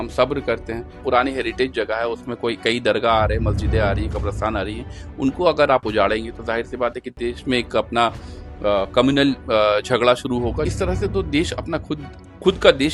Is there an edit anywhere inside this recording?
yes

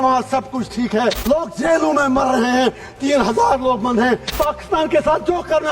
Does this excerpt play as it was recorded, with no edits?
no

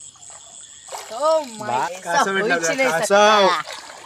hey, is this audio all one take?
no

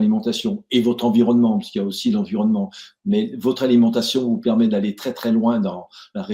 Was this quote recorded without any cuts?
yes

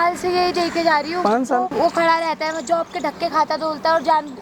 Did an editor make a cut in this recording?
yes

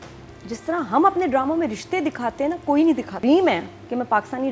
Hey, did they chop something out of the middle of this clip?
yes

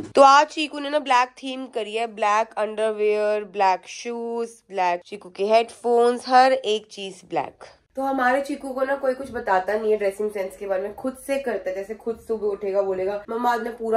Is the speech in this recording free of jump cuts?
yes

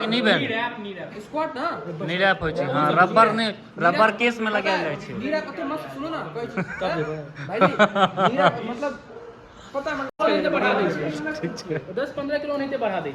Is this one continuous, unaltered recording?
no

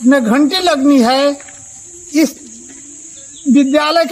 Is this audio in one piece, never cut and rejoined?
yes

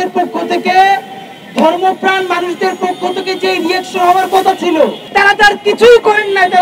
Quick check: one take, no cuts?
no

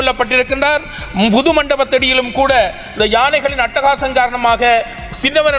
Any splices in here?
no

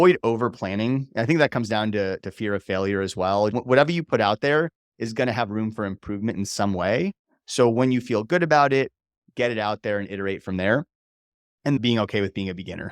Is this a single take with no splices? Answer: no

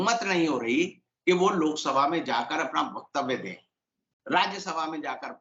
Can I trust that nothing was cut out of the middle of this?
yes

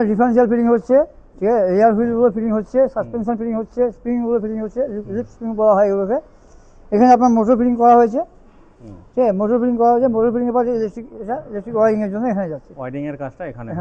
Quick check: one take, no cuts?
yes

